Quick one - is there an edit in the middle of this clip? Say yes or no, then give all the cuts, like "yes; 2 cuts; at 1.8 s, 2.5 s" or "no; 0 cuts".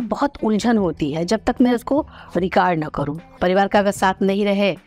yes; 1 cut; at 3.3 s